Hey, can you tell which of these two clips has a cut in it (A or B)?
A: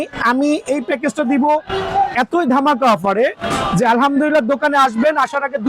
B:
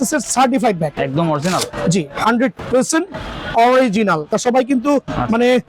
B